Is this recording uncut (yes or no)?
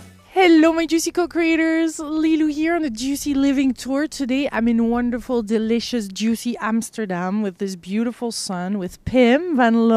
yes